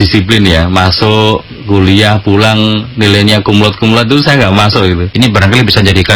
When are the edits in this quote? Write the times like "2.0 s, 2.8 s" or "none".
5.1 s